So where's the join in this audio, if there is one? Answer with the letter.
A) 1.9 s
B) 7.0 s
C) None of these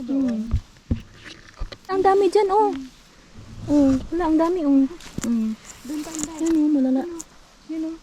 A